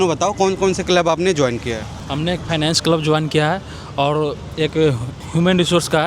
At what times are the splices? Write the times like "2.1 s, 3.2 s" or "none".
none